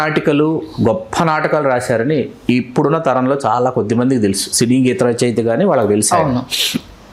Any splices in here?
no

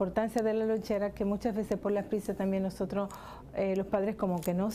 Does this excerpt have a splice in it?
yes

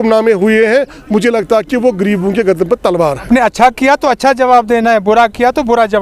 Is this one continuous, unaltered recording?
no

